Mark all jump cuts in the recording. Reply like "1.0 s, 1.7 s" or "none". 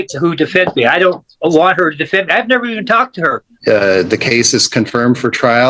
3.5 s